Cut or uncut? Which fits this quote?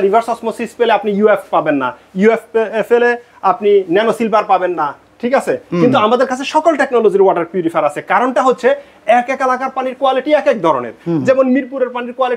uncut